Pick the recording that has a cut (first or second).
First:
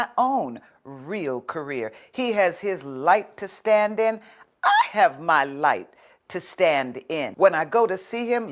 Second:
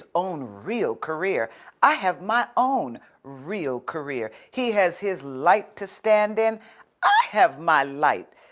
first